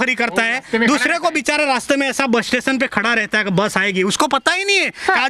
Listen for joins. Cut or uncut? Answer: uncut